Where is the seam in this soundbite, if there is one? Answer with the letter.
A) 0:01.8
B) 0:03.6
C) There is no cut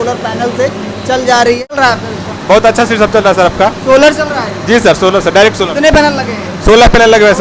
A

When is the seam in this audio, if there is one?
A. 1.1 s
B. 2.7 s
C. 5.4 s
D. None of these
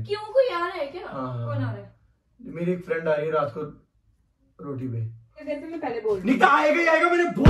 C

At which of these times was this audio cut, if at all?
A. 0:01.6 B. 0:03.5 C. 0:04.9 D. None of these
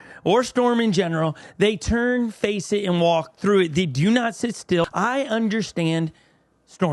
C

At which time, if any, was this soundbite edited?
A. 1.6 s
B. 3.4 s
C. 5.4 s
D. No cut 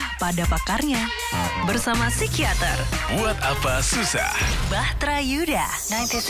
D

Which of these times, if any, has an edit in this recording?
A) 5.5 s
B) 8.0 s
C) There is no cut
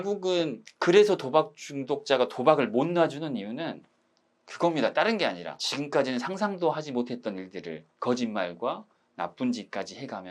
A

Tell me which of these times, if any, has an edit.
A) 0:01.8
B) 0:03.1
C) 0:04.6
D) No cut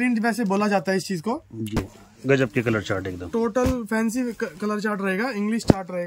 A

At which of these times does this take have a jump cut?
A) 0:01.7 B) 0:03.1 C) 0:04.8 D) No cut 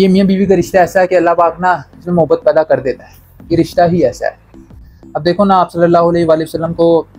D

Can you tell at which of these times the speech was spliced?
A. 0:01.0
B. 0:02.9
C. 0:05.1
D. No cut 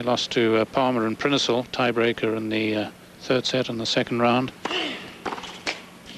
C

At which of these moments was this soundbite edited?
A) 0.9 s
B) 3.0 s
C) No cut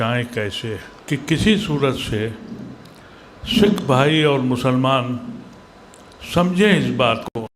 A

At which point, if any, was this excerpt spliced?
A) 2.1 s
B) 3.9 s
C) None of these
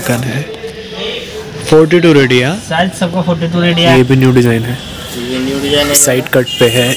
B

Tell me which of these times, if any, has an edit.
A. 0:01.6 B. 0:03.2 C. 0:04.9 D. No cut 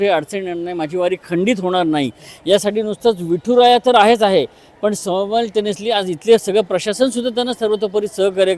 D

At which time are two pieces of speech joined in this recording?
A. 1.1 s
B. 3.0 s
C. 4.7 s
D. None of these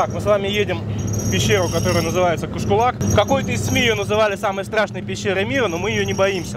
B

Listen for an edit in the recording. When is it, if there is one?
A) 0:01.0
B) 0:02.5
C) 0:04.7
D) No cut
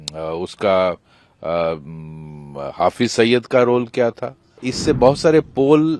C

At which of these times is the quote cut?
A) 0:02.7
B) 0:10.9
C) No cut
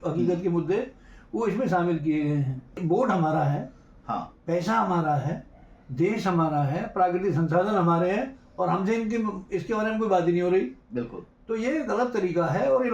A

